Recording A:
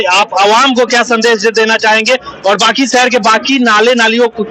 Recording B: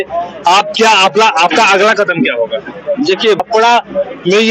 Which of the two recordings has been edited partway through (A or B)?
B